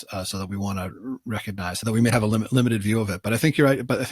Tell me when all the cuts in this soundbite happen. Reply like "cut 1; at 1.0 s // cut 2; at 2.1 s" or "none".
cut 1; at 1.8 s